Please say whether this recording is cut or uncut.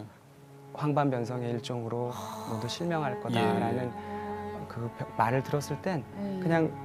uncut